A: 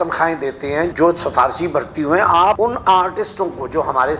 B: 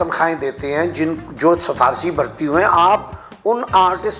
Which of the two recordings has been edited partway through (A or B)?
A